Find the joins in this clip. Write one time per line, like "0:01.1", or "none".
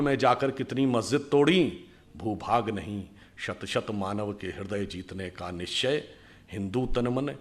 none